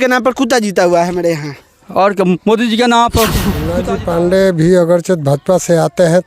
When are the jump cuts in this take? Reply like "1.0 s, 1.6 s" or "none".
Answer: 3.7 s